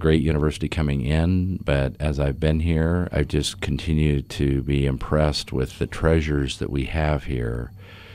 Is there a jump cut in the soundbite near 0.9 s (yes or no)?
no